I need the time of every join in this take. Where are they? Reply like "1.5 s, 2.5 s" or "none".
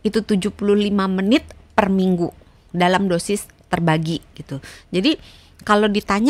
none